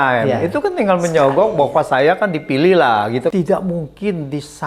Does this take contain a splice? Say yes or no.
yes